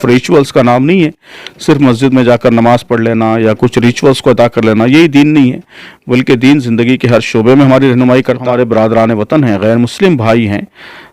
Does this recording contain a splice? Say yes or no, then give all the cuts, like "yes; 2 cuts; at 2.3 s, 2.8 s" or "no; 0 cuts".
yes; 1 cut; at 8.4 s